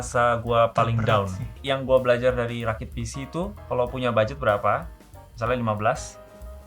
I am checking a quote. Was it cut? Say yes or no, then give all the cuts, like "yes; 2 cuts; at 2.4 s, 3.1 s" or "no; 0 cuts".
yes; 1 cut; at 1.5 s